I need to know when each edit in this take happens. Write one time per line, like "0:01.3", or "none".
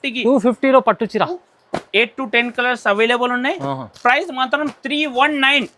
0:01.4